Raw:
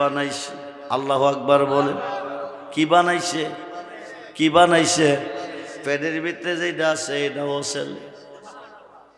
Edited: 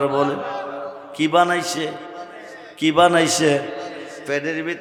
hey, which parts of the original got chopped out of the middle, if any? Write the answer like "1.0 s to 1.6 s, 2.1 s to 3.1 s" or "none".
none